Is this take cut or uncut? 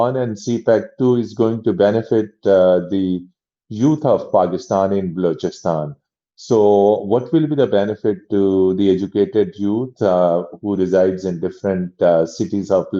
uncut